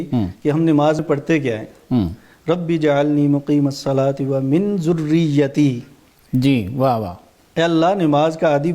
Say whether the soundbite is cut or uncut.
cut